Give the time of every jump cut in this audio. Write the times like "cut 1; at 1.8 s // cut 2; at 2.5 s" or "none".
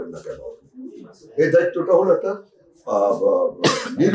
none